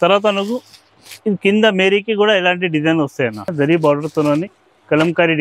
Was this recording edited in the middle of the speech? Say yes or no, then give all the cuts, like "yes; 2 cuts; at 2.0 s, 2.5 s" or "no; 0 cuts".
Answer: yes; 1 cut; at 3.5 s